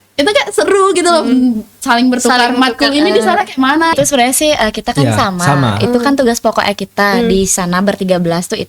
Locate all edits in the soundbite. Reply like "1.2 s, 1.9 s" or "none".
3.9 s